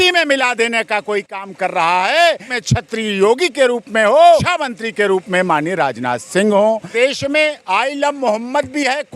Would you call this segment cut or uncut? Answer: cut